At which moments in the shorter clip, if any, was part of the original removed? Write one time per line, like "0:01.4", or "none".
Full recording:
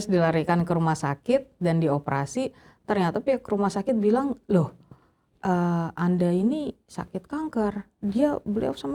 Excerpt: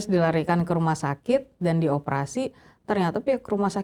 none